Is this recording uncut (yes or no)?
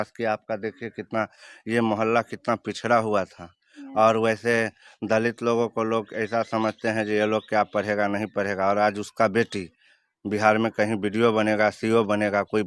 yes